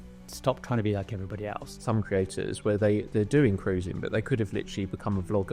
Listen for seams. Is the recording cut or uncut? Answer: cut